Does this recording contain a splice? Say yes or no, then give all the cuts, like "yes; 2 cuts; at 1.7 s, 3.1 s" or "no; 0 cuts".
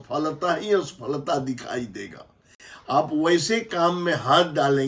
no; 0 cuts